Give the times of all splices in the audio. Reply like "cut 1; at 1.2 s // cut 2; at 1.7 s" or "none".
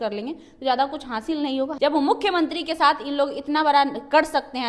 cut 1; at 1.7 s